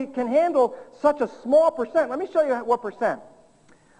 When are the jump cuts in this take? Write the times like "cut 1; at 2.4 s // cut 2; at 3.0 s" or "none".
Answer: cut 1; at 1.1 s